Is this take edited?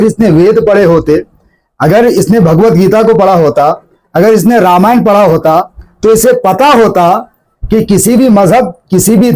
no; 0 cuts

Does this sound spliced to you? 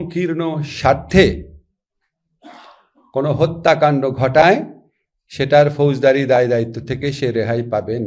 no; 0 cuts

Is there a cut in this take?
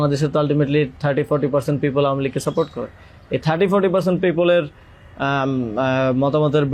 no; 0 cuts

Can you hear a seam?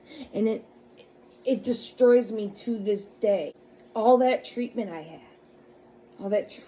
no; 0 cuts

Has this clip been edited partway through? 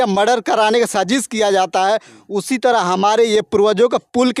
no; 0 cuts

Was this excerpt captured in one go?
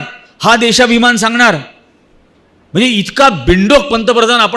yes; 0 cuts

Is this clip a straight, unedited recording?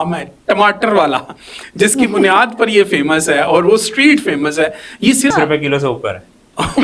no; 1 cut; at 5.3 s

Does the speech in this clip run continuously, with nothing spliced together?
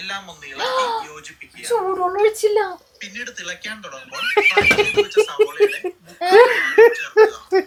yes; 0 cuts

